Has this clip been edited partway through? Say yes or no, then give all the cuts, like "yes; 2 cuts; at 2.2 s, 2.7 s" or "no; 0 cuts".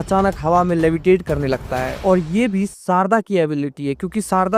no; 0 cuts